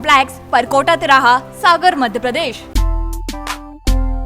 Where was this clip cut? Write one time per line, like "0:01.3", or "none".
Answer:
0:02.6